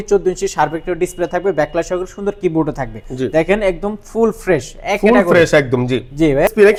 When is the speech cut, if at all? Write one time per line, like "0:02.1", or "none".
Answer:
none